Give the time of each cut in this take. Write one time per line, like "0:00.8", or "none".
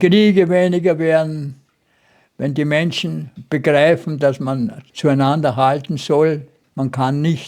0:03.3
0:04.8
0:06.6